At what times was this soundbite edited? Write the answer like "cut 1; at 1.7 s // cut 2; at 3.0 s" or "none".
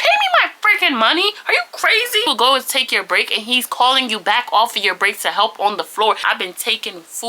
cut 1; at 2.3 s // cut 2; at 6.2 s

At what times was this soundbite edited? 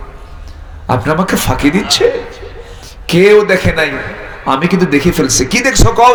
none

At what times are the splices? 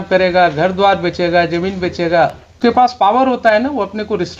cut 1; at 2.9 s

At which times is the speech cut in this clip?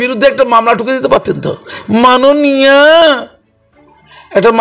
none

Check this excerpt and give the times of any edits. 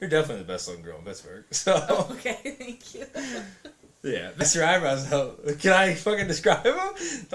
cut 1; at 4.4 s

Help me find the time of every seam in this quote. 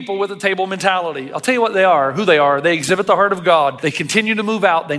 cut 1; at 3.8 s

